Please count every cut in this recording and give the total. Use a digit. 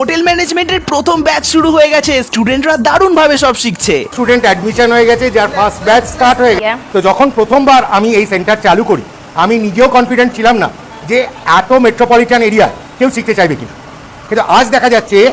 1